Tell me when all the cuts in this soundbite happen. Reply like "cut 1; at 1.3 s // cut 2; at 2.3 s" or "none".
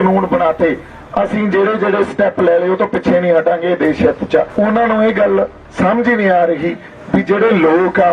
cut 1; at 4.5 s

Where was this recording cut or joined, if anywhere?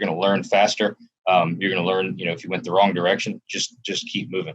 none

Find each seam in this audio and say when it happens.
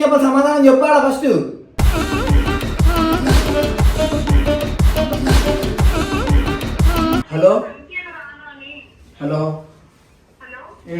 cut 1; at 7.3 s

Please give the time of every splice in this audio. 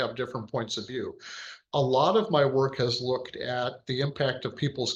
none

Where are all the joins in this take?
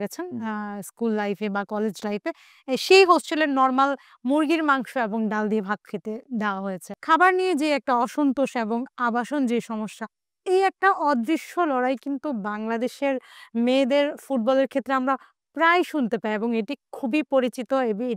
cut 1; at 6.9 s

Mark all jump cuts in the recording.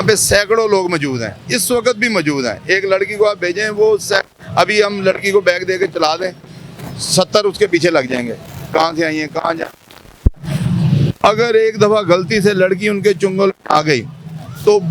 none

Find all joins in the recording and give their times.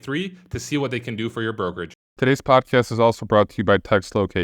cut 1; at 2.0 s

